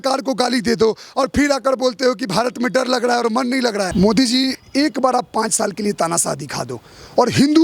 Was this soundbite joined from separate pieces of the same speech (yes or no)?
yes